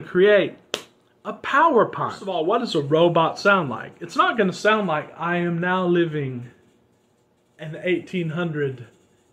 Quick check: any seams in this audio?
yes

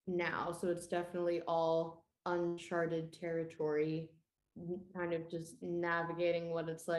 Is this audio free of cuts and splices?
yes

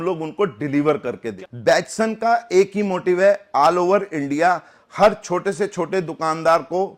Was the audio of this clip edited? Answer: yes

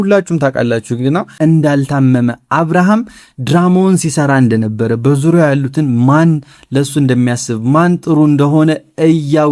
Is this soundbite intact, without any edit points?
no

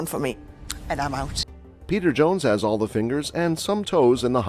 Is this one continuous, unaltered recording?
yes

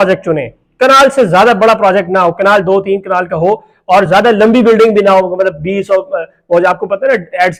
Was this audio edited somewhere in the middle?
no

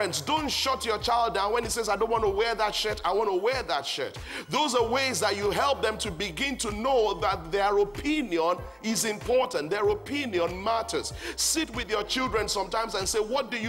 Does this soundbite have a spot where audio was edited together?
no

